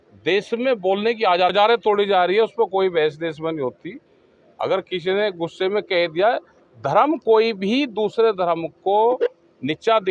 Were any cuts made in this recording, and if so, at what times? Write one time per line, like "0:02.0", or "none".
0:01.5

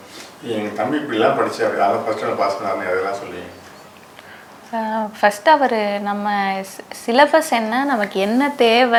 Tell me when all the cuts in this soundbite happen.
none

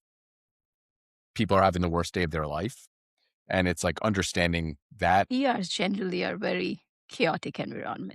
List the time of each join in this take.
0:05.3

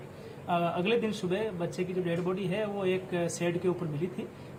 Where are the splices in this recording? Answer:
none

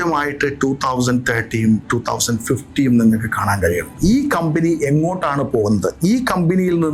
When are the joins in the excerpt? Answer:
0:03.9

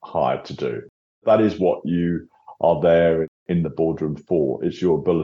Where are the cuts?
none

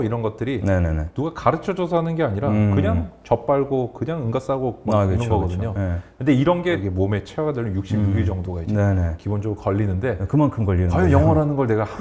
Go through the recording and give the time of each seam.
0:06.8

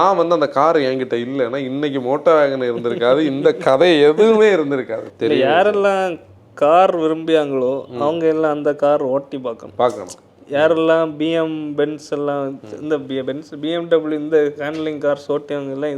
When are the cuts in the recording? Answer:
0:05.0

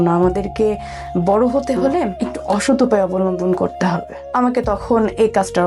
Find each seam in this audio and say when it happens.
0:02.3
0:04.2

